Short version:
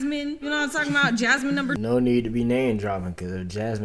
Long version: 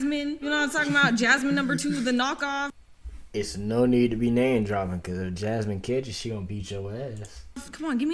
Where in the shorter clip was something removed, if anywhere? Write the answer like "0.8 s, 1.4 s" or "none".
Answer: 1.8 s